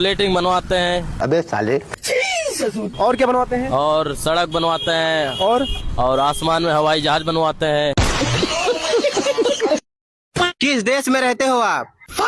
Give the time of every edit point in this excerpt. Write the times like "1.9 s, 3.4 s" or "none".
10.5 s